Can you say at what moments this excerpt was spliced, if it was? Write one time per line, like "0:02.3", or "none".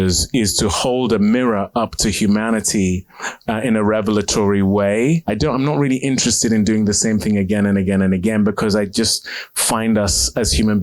0:05.2